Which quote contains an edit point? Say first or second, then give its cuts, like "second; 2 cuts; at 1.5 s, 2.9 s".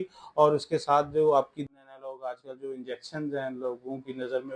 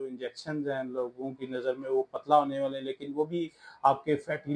first; 1 cut; at 1.7 s